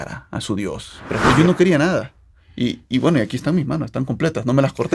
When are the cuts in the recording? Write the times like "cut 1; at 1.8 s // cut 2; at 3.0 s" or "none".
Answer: cut 1; at 1.3 s